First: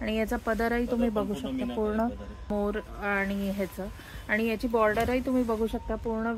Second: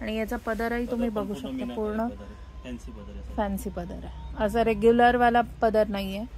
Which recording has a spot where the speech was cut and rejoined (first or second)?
first